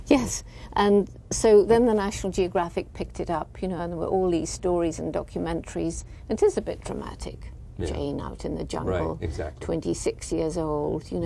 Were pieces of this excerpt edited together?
yes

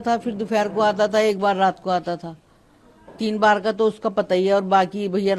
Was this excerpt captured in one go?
yes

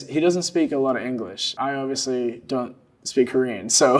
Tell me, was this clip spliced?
no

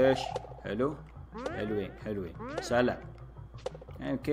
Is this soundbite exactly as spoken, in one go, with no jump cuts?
yes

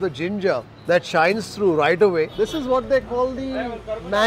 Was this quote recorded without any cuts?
no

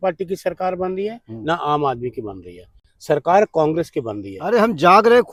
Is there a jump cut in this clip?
no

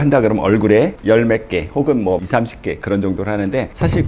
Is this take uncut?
yes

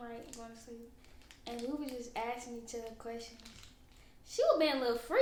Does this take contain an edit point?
no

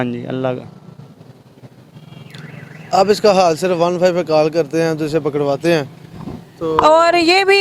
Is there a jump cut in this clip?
no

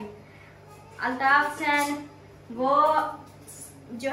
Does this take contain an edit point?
no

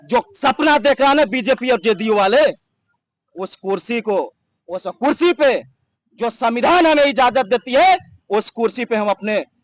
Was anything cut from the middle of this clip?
no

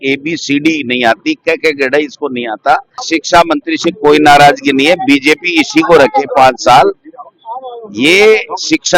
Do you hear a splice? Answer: yes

